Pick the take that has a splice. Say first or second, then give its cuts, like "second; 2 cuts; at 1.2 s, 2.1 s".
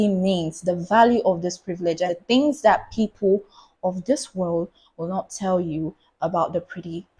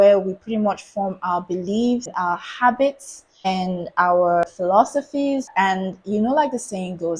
second; 4 cuts; at 2.1 s, 3.5 s, 4.5 s, 5.5 s